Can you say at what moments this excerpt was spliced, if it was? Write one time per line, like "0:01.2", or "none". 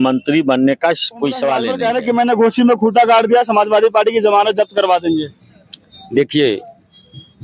0:01.7